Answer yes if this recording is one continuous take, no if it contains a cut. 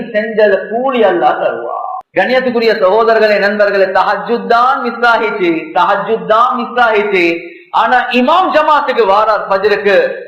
no